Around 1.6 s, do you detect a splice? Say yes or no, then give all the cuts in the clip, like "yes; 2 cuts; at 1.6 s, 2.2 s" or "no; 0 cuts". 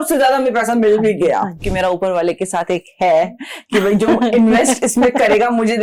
yes; 1 cut; at 1.6 s